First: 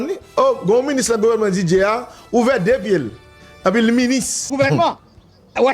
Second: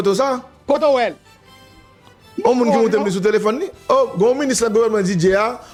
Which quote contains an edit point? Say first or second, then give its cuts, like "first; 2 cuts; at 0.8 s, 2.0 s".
first; 2 cuts; at 3.4 s, 4.5 s